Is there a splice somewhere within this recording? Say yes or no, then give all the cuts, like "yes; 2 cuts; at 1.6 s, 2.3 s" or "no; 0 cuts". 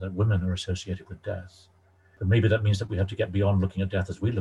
yes; 1 cut; at 2.1 s